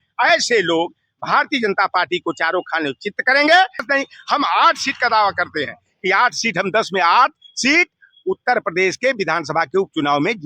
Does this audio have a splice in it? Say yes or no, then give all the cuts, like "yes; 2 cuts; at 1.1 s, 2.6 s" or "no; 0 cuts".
yes; 1 cut; at 3.9 s